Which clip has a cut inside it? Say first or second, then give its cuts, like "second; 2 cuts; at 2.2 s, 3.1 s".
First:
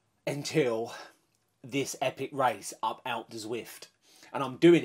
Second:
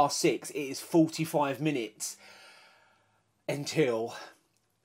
first; 1 cut; at 4.0 s